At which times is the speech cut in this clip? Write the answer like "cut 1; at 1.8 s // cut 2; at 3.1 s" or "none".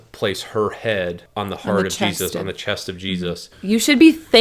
cut 1; at 1.2 s // cut 2; at 3.5 s